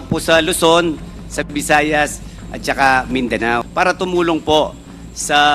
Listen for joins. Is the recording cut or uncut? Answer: cut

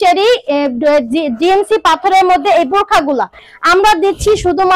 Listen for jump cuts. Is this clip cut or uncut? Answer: cut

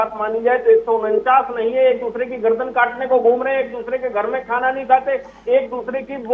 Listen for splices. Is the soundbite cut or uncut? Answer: uncut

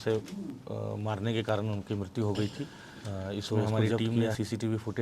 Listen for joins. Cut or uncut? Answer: cut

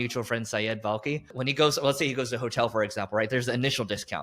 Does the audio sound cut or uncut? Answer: cut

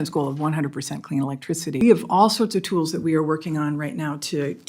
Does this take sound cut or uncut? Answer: cut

